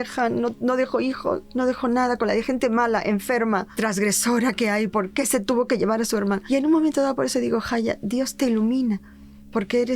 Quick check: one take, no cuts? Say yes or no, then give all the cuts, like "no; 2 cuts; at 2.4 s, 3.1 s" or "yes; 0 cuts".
yes; 0 cuts